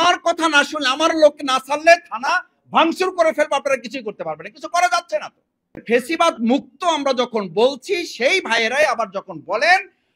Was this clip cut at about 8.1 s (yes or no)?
no